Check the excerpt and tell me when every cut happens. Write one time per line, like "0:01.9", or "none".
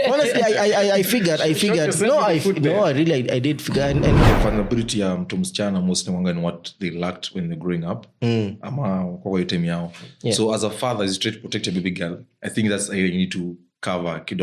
0:04.2

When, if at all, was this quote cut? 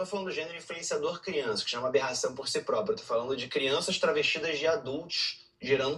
0:03.0

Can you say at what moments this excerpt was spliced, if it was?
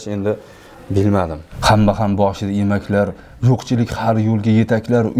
0:01.4

